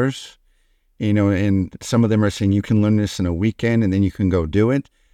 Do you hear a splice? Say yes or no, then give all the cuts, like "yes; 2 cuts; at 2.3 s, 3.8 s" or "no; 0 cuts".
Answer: no; 0 cuts